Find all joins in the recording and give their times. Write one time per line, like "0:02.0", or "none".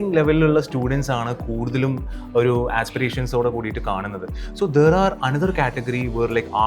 none

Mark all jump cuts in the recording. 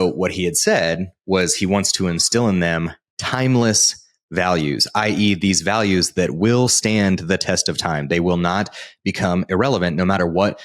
none

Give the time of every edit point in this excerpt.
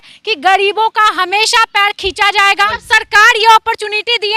0:02.9

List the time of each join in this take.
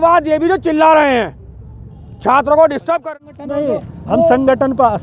0:03.0

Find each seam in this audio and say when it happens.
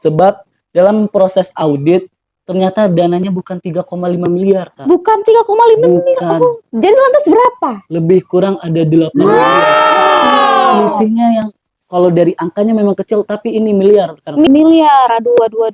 0:14.5

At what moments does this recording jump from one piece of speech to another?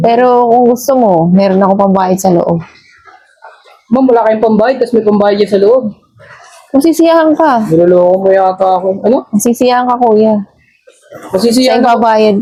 none

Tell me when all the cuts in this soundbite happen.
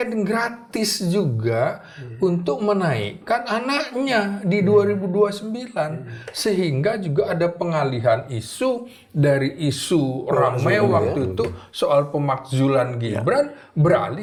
none

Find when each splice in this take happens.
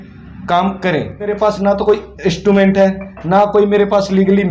0:01.3

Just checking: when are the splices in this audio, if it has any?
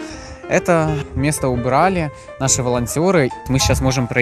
0:01.1
0:03.4

